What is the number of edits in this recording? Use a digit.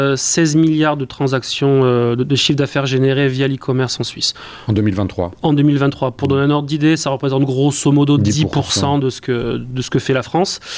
0